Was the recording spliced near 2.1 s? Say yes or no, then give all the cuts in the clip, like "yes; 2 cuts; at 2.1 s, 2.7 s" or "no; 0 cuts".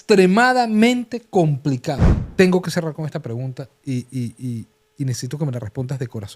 yes; 1 cut; at 2.1 s